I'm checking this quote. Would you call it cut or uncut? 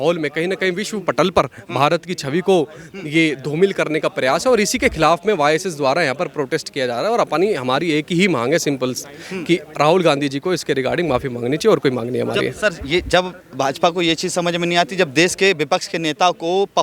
uncut